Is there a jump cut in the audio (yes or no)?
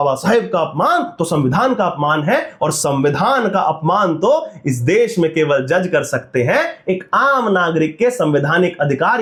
no